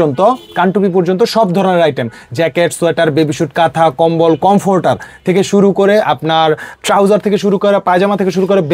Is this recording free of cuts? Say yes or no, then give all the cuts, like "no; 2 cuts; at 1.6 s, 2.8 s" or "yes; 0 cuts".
yes; 0 cuts